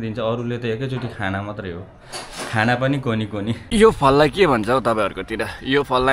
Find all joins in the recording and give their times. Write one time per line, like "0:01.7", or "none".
0:03.6